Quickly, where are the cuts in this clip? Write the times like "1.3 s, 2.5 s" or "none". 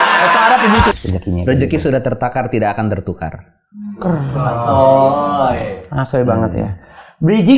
0.9 s

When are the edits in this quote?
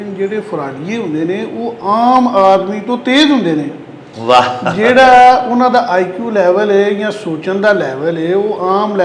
none

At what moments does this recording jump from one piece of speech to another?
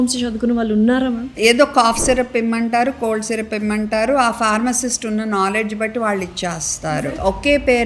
1.3 s, 6.9 s

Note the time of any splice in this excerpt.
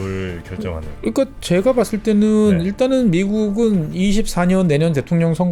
none

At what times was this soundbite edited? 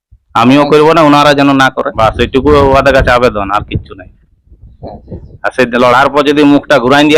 1.9 s

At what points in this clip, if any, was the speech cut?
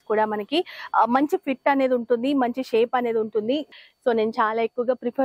3.7 s

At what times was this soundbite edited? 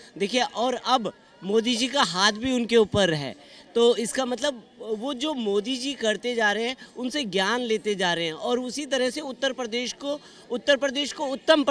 none

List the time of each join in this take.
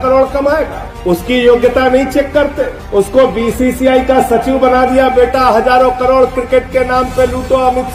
none

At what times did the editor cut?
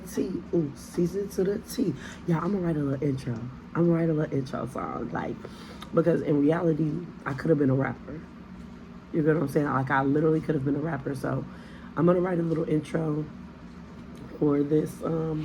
none

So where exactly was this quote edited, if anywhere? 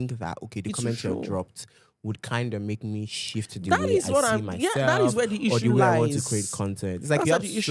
none

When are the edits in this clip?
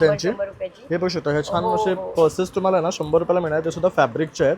none

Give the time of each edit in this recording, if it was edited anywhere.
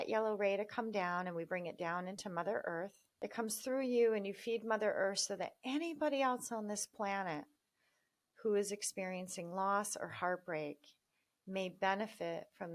3.0 s

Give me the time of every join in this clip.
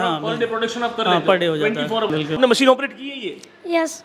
2.4 s

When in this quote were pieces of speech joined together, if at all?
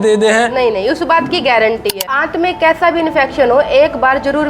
2.1 s

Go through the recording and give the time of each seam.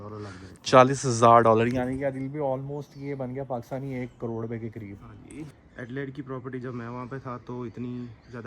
5.5 s

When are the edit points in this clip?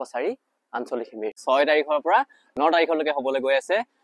1.4 s

